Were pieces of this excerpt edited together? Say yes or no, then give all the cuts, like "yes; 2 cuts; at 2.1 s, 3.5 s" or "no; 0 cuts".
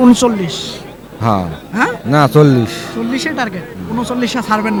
no; 0 cuts